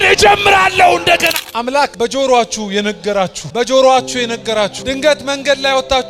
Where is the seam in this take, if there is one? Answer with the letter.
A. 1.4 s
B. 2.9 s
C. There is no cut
A